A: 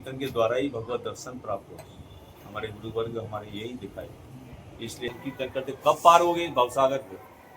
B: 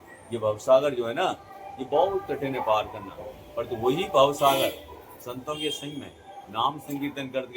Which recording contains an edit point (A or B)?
A